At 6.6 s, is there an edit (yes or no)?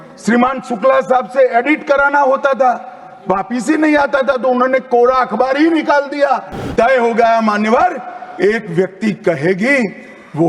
yes